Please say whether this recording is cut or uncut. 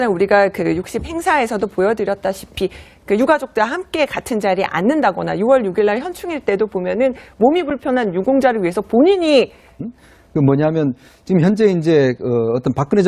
uncut